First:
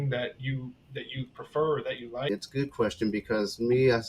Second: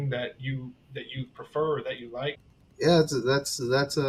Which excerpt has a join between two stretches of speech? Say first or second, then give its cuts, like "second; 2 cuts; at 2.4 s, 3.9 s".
first; 1 cut; at 2.3 s